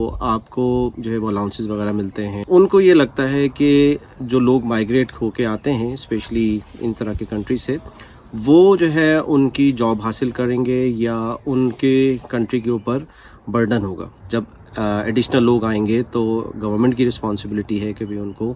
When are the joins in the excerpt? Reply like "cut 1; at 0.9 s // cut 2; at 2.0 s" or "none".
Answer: cut 1; at 2.4 s // cut 2; at 14.1 s

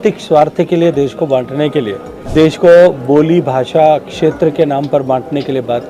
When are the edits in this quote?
cut 1; at 2.1 s

